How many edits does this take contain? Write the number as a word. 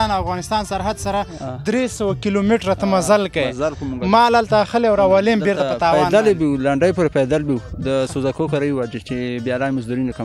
zero